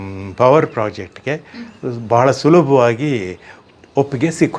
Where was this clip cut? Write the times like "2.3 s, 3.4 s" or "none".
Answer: none